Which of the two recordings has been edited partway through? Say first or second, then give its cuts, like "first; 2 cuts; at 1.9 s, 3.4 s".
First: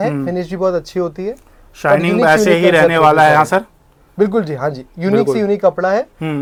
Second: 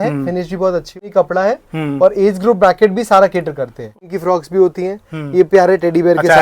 second; 2 cuts; at 1.1 s, 4.1 s